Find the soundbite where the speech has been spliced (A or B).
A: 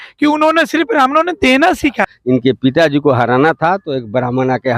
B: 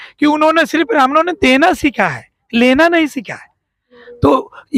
A